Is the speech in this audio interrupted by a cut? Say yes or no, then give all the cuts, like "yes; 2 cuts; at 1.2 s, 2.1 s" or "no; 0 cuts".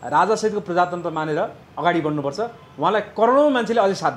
yes; 1 cut; at 1.6 s